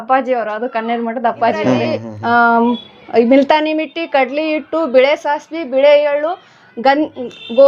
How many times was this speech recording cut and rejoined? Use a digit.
1